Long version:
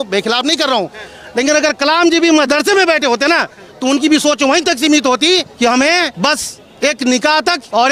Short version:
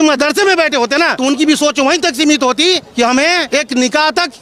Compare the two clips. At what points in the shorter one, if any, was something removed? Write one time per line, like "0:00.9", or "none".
0:01.1
0:03.4